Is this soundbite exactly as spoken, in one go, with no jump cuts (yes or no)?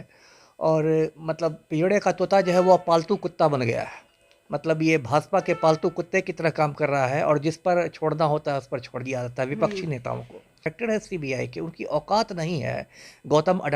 no